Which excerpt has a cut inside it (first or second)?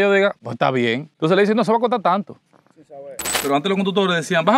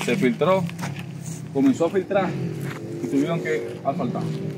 first